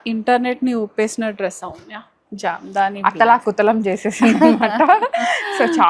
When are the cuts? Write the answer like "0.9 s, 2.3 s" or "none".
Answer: none